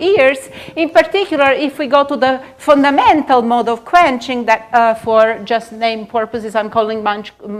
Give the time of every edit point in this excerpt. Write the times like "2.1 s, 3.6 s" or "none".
5.9 s